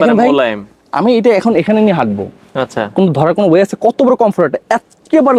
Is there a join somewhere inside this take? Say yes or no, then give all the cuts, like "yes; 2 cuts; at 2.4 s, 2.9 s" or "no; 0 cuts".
no; 0 cuts